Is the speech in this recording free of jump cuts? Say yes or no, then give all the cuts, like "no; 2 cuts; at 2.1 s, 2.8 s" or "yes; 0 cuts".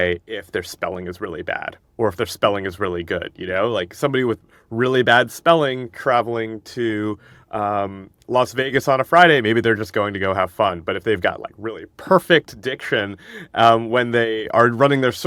yes; 0 cuts